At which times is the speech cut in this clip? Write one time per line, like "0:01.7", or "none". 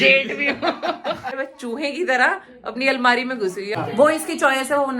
0:01.3
0:03.7